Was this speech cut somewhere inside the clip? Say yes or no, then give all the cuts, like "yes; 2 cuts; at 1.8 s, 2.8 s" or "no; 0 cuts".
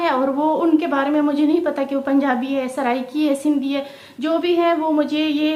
no; 0 cuts